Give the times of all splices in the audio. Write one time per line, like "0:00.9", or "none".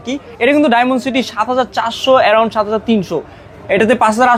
none